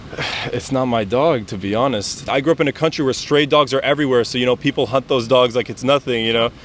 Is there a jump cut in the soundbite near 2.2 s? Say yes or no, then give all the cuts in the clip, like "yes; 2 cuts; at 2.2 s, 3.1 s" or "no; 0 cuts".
yes; 1 cut; at 2.2 s